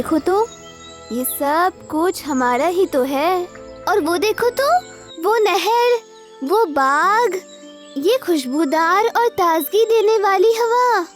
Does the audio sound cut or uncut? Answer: uncut